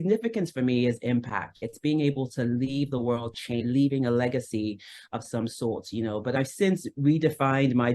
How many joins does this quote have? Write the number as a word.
three